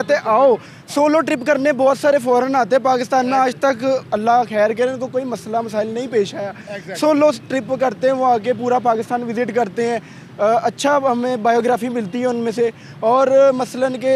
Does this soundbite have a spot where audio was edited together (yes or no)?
no